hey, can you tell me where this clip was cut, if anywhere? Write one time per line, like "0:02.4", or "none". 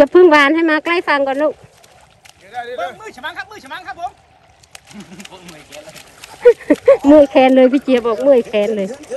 none